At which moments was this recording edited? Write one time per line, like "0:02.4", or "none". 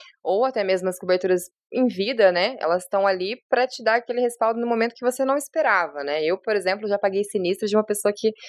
none